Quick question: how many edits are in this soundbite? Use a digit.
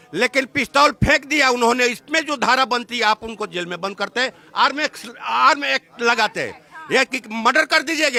0